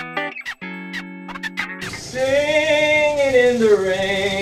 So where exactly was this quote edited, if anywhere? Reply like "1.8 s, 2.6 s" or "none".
none